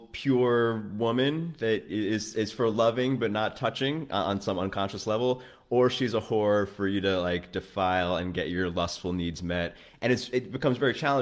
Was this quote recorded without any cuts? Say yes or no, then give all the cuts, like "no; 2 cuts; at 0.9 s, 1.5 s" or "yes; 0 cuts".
yes; 0 cuts